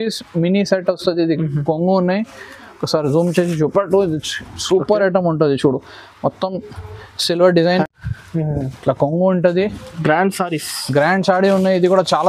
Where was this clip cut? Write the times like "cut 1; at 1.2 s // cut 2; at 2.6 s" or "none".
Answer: cut 1; at 7.9 s